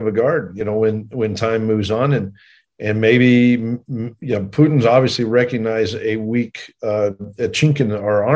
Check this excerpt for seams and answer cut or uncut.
uncut